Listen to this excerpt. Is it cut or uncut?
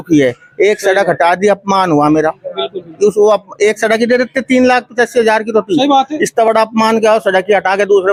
uncut